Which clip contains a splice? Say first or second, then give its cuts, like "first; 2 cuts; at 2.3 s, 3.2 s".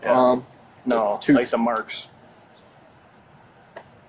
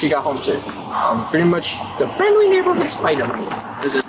second; 1 cut; at 0.9 s